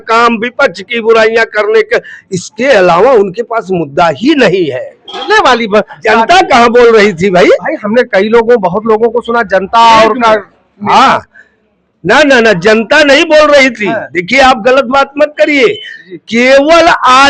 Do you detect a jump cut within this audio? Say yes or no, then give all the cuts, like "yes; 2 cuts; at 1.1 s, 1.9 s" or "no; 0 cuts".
yes; 1 cut; at 5.3 s